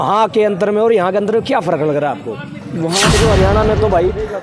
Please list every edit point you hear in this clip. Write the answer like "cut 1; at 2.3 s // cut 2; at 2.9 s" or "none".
cut 1; at 3.2 s